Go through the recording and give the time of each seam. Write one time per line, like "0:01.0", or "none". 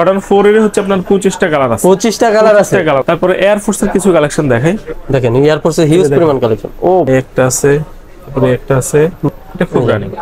0:03.0
0:07.1
0:09.3

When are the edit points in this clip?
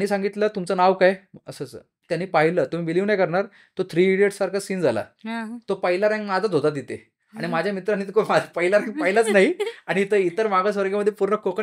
none

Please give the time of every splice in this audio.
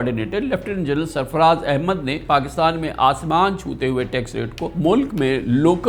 0:02.2
0:04.6

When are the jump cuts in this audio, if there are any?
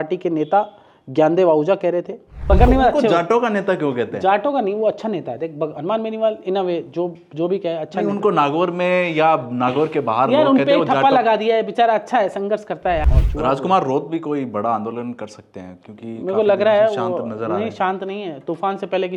0:02.3
0:13.1

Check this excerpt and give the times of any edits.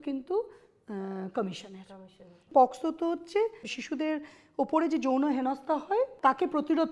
0:02.5
0:03.7
0:06.1

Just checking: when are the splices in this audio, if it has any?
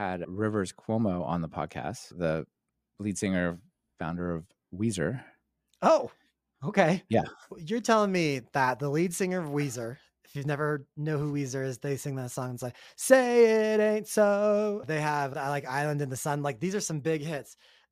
0:07.6
0:14.8

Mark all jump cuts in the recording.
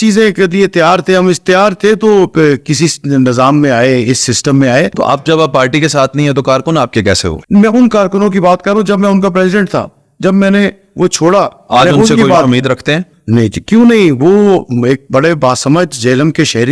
0:05.2
0:07.3

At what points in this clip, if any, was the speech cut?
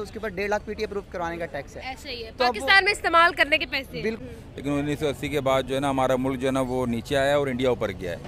0:04.2

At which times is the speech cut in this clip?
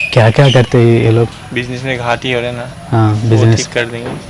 0:01.4

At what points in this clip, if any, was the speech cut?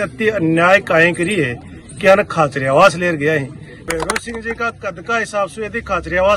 0:03.8

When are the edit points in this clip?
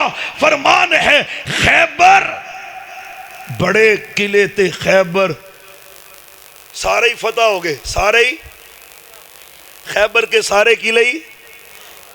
none

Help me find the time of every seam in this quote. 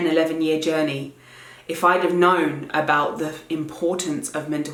none

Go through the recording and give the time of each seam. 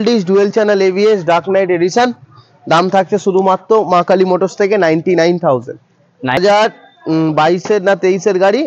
0:06.4

